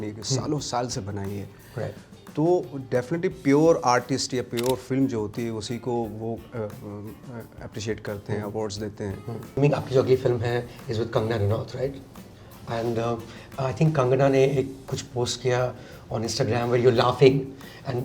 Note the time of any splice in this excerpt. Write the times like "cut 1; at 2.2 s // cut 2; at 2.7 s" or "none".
cut 1; at 9.6 s